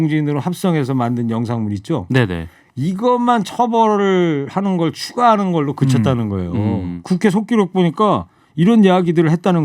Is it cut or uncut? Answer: cut